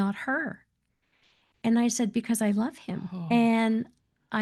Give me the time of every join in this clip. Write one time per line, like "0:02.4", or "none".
none

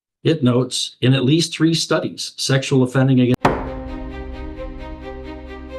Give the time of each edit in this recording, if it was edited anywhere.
0:03.3

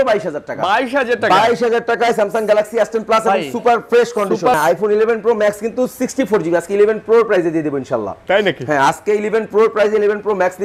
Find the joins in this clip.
0:04.6

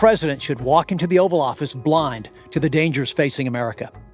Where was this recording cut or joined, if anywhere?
none

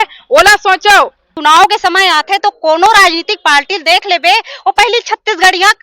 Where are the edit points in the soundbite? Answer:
0:01.3

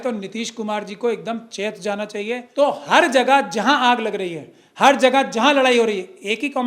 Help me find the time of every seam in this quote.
0:02.5

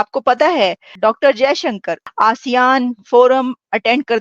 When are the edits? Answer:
0:00.9
0:02.0

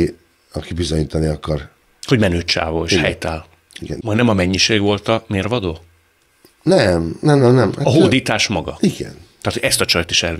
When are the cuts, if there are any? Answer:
0:04.0

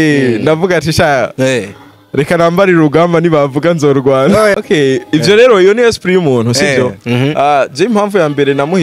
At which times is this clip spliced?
0:04.6

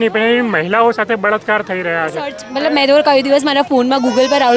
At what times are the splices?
0:02.4

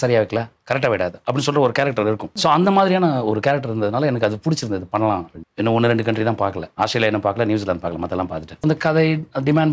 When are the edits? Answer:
0:02.3
0:05.4
0:06.6
0:08.6

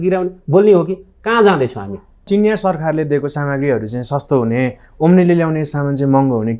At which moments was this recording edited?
0:02.3

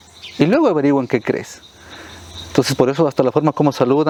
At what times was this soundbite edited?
none

